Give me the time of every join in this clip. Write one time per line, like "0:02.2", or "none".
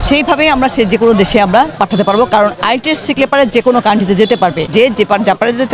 0:01.7
0:04.6